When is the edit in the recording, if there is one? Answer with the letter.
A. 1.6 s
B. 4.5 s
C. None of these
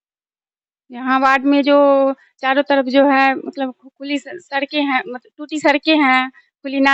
C